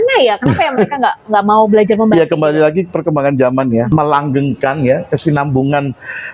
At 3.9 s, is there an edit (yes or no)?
yes